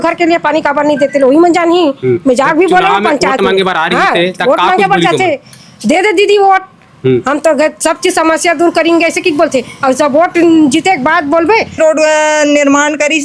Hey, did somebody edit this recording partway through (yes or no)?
yes